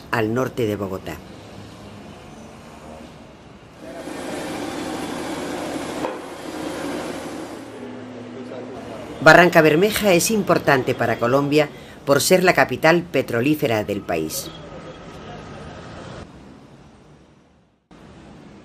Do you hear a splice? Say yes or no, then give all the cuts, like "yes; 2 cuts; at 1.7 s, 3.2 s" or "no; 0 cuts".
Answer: no; 0 cuts